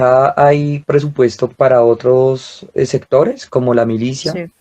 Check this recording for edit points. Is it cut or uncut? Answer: cut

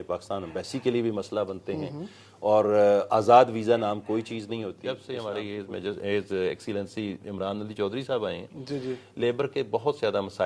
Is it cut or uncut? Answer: cut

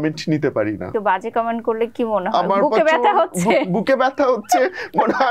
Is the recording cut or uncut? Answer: cut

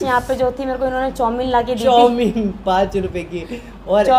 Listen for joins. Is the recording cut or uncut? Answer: uncut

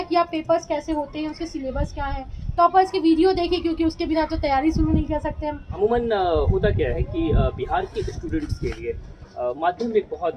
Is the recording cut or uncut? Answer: cut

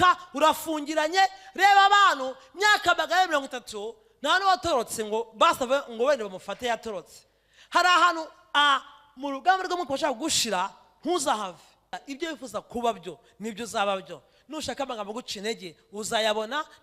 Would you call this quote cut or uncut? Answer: cut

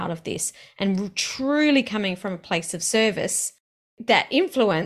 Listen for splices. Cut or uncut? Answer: cut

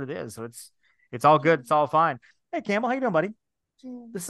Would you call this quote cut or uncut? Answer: cut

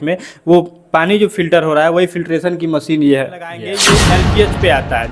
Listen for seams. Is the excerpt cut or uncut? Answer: cut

